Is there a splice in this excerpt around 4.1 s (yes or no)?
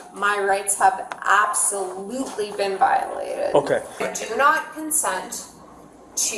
yes